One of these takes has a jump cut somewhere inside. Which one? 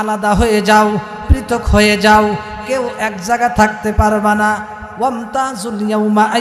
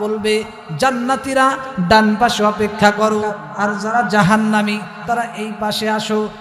second; 1 cut; at 3.4 s

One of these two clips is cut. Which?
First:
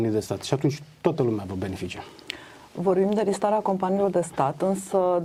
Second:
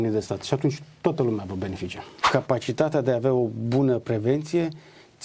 second; 1 cut; at 2.3 s

